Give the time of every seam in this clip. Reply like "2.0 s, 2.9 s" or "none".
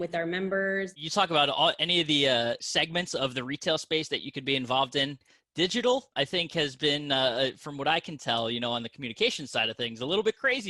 1.0 s, 2.6 s, 6.1 s